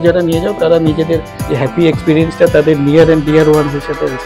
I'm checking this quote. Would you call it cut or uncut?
cut